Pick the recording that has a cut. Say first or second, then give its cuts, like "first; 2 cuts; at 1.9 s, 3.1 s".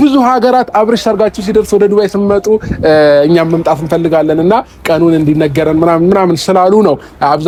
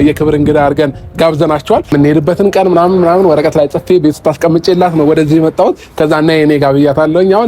second; 1 cut; at 1.9 s